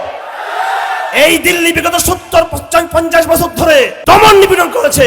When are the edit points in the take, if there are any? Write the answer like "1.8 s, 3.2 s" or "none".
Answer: 3.9 s

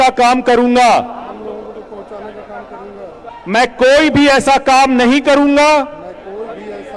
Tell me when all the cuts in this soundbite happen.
3.3 s

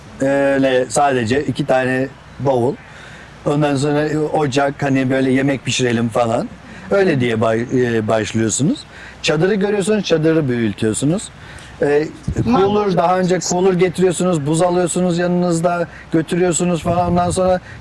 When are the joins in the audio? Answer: none

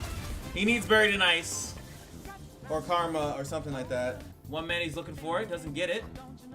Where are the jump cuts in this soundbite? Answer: 4.3 s

